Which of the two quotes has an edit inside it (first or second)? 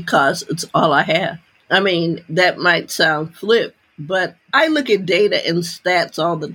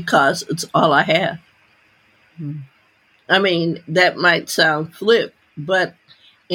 first